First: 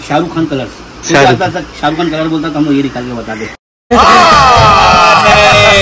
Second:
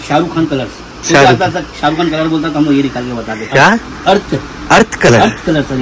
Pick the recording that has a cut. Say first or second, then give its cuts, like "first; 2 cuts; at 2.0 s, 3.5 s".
second; 2 cuts; at 3.4 s, 4.8 s